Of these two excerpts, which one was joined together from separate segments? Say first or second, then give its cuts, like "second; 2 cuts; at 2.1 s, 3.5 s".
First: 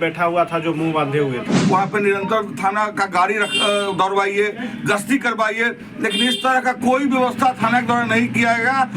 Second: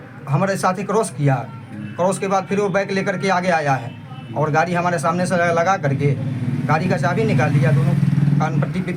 first; 1 cut; at 1.5 s